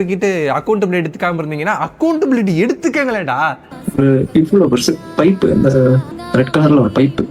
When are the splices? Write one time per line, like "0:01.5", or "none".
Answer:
0:03.6
0:06.1